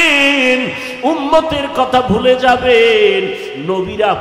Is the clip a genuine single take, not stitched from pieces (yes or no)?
yes